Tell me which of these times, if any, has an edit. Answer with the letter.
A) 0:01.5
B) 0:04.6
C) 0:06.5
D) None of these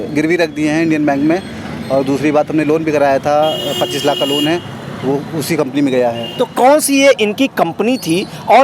D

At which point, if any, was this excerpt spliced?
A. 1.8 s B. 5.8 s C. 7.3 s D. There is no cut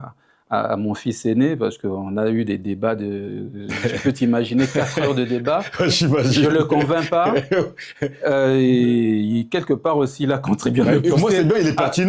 D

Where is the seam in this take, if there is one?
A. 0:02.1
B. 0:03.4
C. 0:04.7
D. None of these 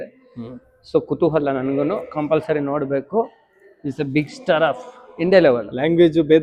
D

